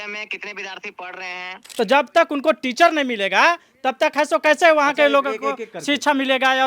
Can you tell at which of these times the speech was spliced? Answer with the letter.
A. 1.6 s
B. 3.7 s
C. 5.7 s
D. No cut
A